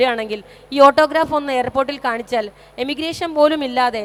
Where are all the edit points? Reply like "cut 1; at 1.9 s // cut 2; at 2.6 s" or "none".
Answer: none